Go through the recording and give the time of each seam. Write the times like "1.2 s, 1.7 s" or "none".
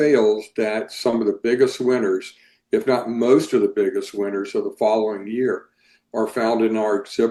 none